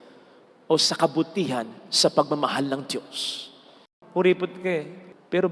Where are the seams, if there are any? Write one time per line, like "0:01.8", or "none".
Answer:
0:04.0